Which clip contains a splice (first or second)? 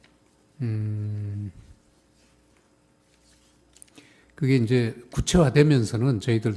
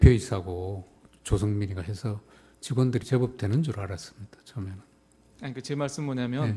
first